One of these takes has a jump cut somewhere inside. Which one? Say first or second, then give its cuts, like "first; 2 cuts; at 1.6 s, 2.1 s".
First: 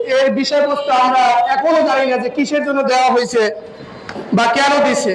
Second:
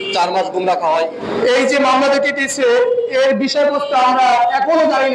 second; 1 cut; at 1.2 s